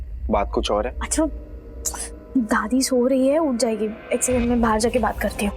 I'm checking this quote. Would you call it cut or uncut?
cut